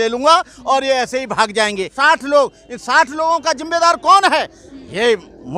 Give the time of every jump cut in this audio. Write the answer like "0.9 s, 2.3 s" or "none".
2.0 s